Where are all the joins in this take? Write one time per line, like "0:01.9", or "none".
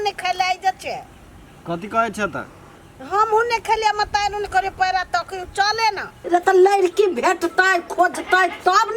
0:06.2